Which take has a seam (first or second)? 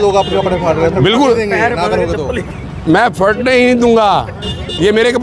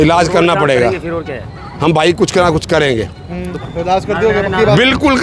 second